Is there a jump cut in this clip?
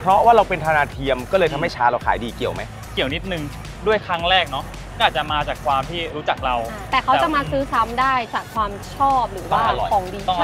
no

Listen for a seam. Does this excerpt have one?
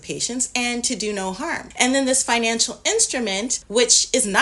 yes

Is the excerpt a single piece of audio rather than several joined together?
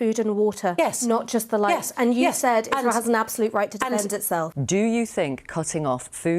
no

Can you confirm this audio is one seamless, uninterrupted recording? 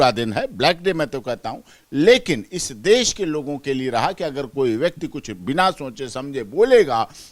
yes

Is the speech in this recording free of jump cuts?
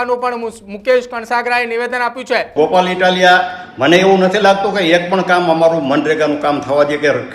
no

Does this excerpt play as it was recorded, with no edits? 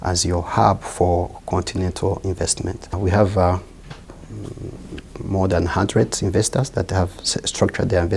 yes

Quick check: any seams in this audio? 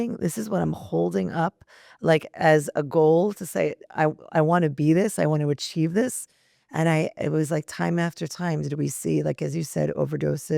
no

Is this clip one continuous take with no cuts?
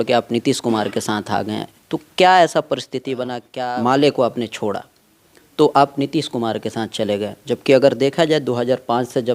no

